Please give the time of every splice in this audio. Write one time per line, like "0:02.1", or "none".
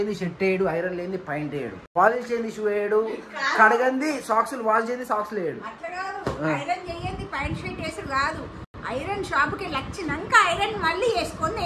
none